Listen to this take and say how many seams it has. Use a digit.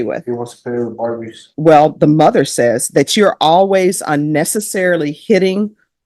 1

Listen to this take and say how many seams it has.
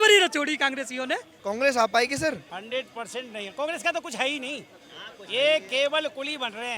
2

